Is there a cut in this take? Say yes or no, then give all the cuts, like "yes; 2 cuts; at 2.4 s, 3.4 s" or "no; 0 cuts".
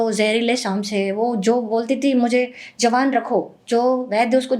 no; 0 cuts